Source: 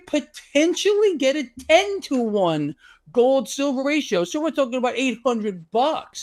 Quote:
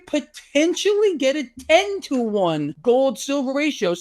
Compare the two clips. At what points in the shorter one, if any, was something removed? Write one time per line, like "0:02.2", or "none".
0:02.7